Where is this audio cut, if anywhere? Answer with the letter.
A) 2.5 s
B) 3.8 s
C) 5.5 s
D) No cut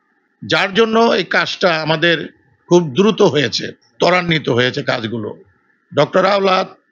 D